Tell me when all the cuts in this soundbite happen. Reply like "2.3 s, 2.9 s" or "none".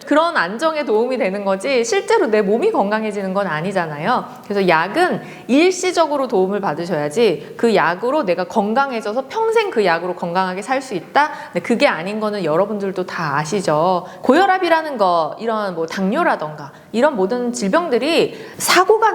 14.1 s